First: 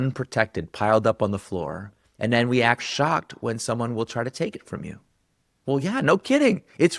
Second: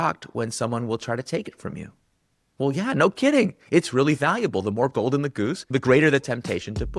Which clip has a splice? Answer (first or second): second